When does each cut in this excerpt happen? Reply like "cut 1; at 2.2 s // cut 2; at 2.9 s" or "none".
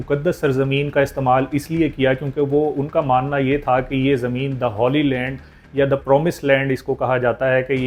none